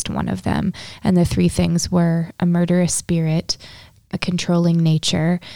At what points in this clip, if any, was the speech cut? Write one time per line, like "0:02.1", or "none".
0:04.1